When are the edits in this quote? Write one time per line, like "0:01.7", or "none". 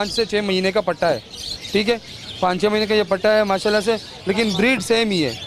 none